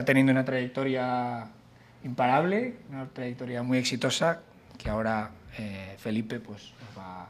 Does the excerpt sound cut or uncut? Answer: cut